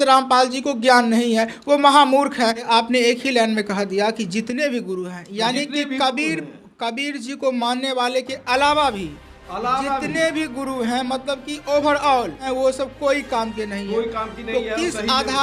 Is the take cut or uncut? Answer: cut